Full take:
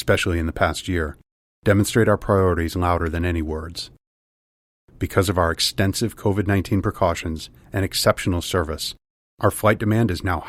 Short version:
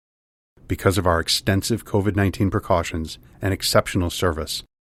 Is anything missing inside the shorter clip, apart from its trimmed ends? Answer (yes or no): no